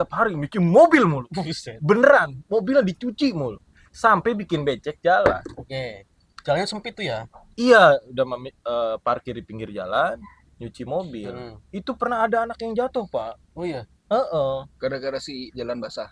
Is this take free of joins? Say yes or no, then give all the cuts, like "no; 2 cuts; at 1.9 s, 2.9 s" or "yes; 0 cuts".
yes; 0 cuts